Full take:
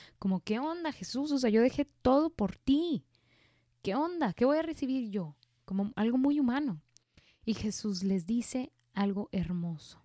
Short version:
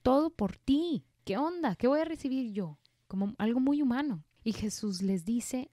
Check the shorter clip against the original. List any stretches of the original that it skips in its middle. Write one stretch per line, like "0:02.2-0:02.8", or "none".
0:03.1-0:03.7
0:06.9-0:07.3